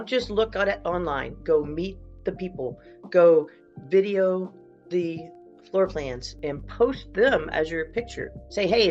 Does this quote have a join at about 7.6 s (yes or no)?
no